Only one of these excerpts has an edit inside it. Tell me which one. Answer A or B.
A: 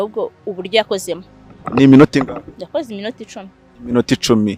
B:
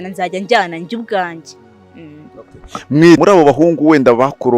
B